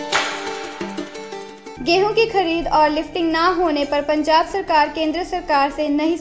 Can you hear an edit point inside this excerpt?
no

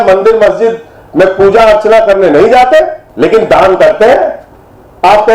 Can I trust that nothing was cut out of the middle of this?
no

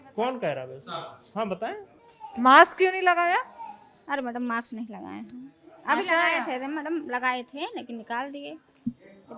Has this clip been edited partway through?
yes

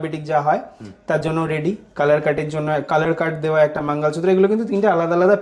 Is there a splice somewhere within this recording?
no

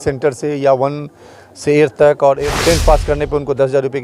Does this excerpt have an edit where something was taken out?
yes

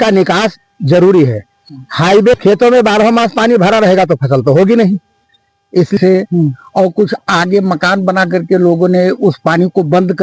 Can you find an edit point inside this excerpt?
yes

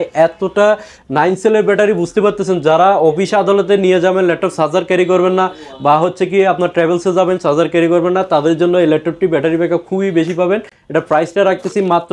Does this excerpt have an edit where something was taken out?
no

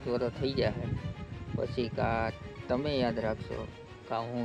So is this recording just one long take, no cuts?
yes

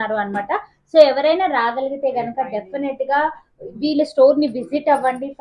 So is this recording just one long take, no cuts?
yes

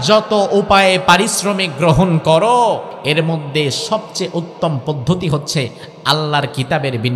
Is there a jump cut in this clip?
yes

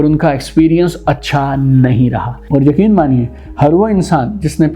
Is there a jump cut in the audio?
yes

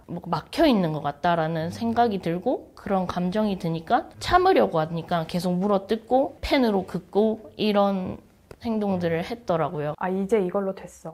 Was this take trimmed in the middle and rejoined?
yes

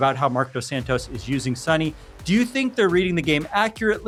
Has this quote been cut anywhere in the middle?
no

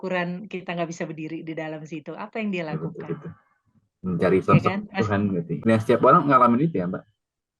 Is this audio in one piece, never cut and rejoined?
no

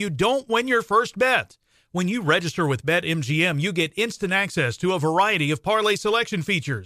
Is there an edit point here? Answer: no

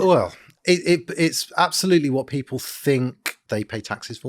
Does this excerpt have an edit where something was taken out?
yes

